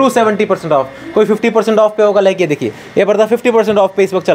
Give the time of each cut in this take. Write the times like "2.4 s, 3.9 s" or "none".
none